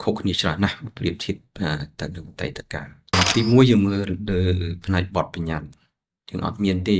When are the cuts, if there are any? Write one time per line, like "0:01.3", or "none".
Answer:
0:03.1